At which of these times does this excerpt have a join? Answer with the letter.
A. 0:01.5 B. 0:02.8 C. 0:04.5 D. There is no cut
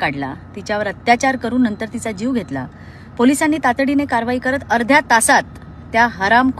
D